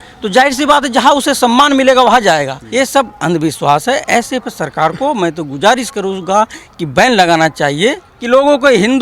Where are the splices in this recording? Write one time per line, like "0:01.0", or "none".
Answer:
0:02.6
0:08.1